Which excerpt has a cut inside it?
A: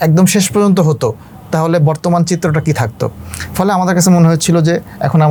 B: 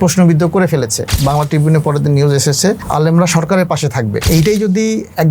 B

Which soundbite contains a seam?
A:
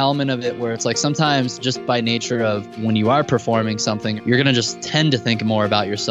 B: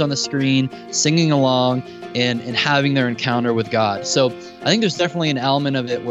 A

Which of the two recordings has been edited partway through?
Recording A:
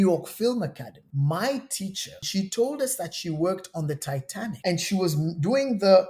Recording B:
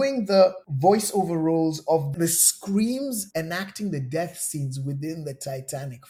A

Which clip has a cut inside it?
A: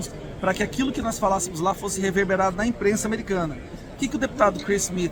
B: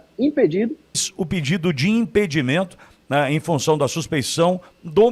B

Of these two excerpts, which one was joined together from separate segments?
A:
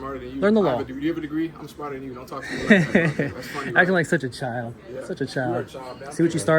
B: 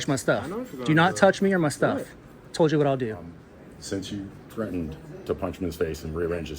B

